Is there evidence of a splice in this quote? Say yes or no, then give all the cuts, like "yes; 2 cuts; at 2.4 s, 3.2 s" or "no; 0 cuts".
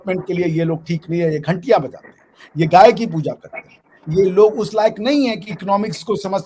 no; 0 cuts